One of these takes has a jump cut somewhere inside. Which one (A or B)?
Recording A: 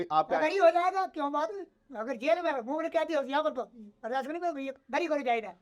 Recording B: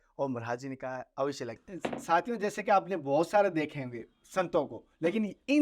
B